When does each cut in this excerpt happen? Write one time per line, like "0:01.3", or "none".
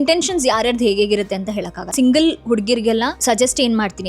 0:01.9
0:03.2